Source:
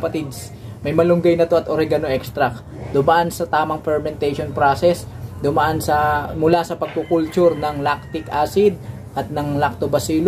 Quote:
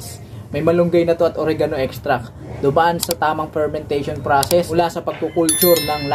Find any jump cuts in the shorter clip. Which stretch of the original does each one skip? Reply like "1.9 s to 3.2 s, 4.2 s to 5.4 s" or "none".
5.0 s to 6.5 s